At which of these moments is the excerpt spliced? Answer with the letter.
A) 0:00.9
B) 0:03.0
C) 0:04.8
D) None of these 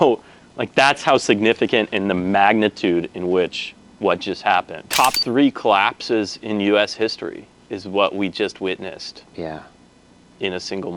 C